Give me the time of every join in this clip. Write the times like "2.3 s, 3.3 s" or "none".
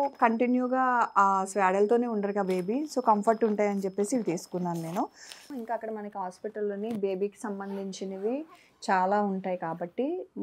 5.4 s

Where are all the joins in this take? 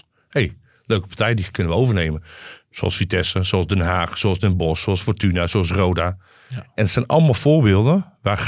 none

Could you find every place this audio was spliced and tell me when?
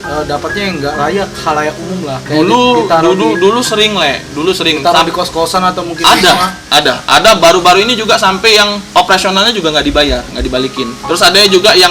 2.2 s, 6.6 s, 8.8 s, 11.0 s

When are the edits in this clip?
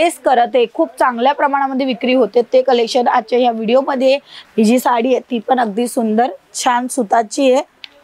4.3 s

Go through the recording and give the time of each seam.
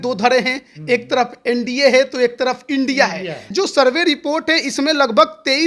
3.5 s

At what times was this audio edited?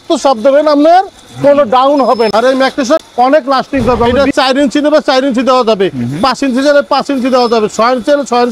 2.3 s, 4.1 s

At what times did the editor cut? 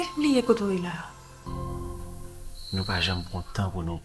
1.5 s

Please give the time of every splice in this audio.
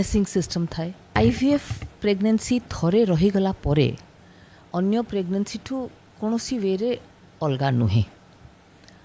1.0 s

